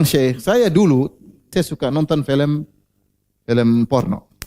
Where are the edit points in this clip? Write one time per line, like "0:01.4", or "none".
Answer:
0:01.5